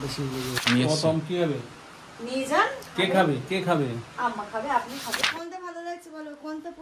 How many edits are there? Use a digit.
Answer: 1